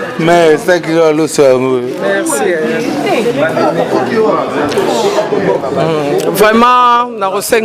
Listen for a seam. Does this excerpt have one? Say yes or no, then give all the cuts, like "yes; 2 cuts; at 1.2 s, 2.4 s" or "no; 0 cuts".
no; 0 cuts